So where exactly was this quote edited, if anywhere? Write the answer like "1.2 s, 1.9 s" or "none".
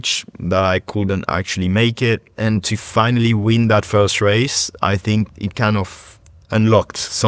2.3 s